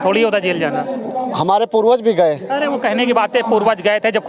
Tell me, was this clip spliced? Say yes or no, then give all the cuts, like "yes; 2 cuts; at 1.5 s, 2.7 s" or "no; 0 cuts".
no; 0 cuts